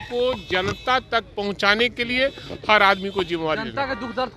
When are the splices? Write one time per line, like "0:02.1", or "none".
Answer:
none